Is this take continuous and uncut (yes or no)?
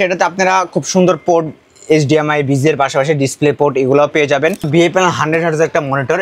no